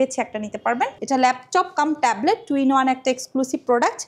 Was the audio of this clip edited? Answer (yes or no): yes